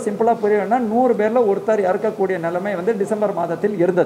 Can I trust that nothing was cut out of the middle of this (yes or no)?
yes